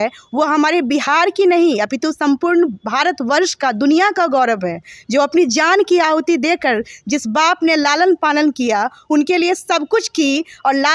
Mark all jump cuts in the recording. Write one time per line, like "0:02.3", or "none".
none